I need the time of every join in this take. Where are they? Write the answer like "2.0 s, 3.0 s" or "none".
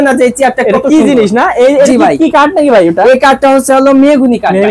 none